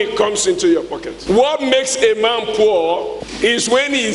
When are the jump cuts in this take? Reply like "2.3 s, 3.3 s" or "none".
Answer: 1.1 s, 3.2 s